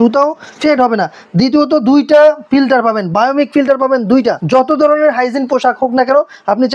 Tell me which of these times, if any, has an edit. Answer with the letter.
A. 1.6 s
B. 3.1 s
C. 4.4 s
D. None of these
C